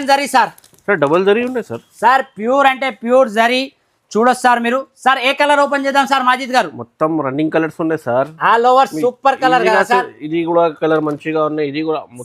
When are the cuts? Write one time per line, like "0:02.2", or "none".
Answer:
none